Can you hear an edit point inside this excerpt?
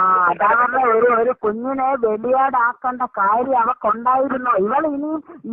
no; 0 cuts

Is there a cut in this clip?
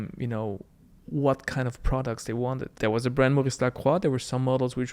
yes; 1 cut; at 2.6 s

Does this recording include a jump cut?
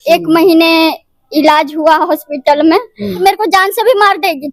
yes; 1 cut; at 3.2 s

